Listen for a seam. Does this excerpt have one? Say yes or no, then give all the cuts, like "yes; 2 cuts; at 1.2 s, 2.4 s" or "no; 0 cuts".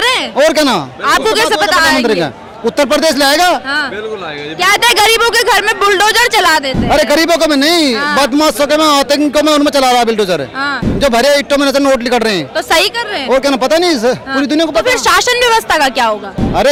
no; 0 cuts